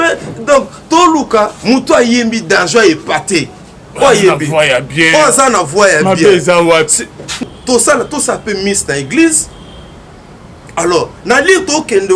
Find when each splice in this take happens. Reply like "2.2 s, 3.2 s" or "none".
7.4 s